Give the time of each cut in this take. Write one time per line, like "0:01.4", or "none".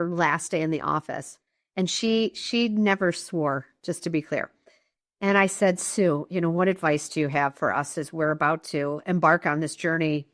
none